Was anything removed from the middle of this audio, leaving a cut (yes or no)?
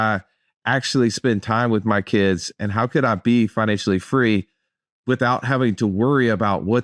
no